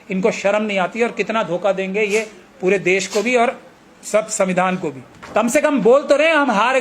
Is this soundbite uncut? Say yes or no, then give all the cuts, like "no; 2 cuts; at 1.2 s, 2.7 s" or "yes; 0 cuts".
no; 1 cut; at 5.1 s